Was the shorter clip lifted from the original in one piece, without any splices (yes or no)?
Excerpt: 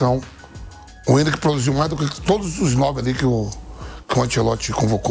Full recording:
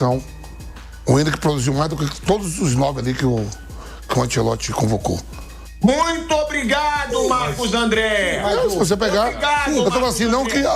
yes